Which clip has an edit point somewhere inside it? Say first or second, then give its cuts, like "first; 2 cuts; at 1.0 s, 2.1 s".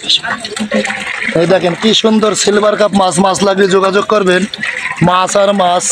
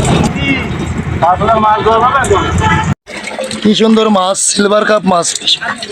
second; 1 cut; at 3.0 s